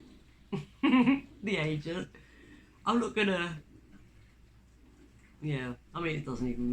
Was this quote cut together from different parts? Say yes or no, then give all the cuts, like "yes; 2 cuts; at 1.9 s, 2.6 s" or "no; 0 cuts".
no; 0 cuts